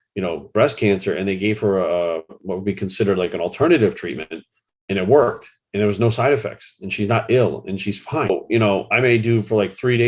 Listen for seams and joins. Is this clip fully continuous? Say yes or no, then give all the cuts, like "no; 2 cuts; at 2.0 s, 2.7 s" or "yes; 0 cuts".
no; 1 cut; at 8.3 s